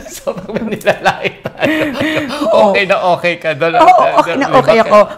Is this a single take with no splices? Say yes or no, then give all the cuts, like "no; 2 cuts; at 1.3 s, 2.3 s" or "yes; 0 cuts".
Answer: yes; 0 cuts